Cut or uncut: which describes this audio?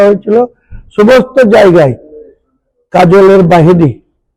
uncut